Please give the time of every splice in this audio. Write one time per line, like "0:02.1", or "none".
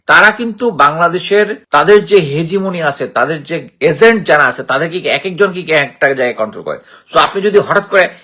0:01.6